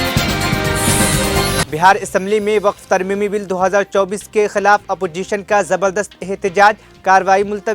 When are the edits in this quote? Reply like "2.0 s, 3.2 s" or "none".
1.7 s